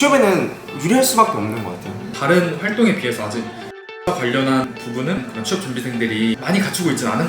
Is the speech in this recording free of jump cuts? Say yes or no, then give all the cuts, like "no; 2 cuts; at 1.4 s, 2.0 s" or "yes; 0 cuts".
no; 3 cuts; at 2.1 s, 4.7 s, 6.4 s